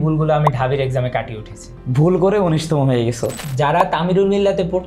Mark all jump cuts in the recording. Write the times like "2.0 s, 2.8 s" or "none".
3.4 s